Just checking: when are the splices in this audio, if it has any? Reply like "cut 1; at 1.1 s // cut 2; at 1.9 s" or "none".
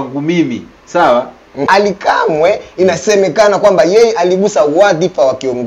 cut 1; at 1.7 s